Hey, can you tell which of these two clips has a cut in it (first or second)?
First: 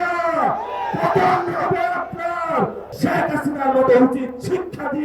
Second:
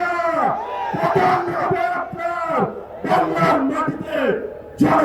first